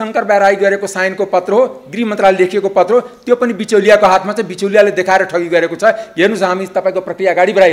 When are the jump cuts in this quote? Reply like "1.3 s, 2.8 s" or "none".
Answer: none